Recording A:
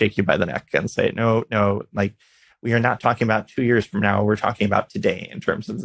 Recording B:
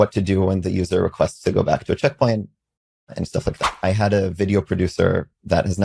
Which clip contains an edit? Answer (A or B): B